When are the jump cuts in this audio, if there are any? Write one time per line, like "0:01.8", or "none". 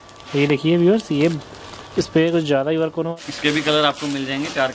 0:03.1